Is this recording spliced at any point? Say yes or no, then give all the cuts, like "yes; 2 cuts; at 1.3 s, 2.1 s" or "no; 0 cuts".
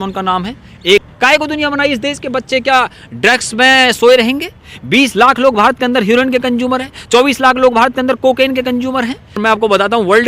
yes; 2 cuts; at 1.0 s, 9.4 s